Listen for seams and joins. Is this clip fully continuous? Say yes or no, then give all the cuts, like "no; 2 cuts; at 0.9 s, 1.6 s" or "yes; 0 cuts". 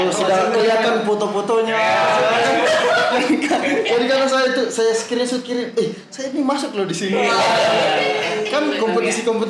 yes; 0 cuts